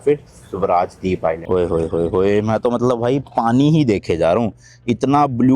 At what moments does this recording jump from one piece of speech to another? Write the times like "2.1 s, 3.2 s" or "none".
1.4 s